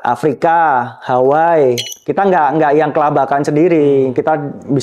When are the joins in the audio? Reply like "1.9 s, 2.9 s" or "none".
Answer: 2.0 s